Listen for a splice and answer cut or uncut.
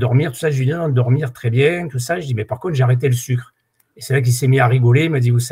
uncut